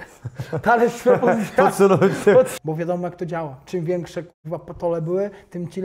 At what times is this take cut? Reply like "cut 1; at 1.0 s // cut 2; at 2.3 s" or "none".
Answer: cut 1; at 2.5 s